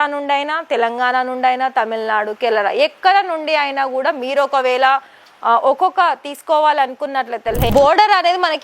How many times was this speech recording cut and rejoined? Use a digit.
1